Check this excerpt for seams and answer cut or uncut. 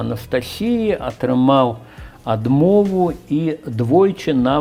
uncut